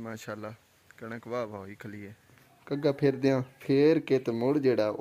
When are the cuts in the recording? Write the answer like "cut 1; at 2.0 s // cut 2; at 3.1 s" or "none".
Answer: cut 1; at 2.5 s // cut 2; at 3.5 s